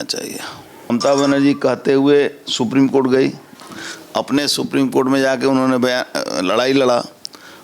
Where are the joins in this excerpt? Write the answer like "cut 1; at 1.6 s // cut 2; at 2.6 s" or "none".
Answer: cut 1; at 0.9 s